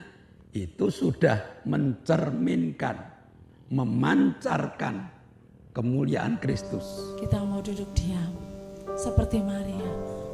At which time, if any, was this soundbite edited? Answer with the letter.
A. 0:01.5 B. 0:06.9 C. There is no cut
B